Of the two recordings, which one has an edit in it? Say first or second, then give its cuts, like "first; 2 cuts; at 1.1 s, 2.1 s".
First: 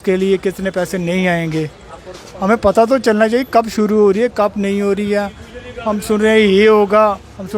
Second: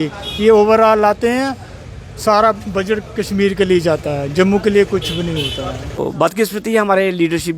second; 1 cut; at 6.0 s